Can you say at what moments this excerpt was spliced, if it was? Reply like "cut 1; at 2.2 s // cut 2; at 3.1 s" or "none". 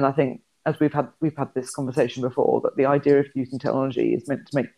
none